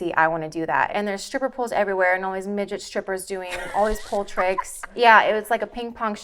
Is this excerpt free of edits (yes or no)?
no